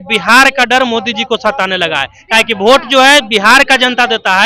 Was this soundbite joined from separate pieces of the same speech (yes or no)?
no